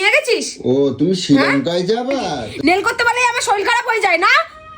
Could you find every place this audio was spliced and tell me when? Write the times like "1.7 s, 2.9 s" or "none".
2.5 s